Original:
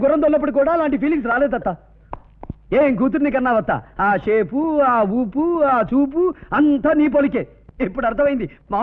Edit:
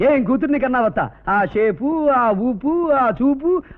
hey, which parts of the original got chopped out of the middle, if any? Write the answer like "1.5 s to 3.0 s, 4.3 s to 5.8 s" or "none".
none